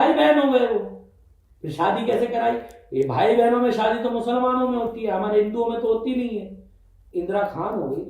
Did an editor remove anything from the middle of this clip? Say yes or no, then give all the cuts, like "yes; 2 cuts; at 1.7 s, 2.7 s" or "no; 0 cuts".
yes; 1 cut; at 7.1 s